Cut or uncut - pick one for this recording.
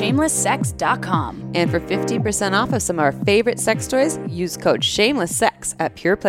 uncut